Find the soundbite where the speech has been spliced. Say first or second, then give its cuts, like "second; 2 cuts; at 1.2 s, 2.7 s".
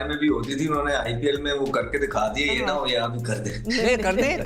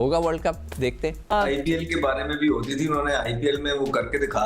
second; 1 cut; at 1.1 s